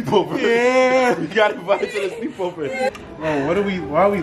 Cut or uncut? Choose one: cut